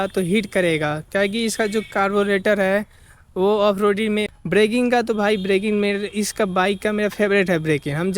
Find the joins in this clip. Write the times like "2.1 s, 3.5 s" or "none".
4.4 s